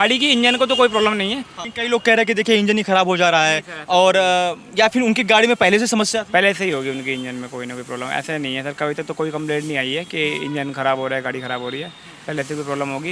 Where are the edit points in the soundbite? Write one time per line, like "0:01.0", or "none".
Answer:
0:01.5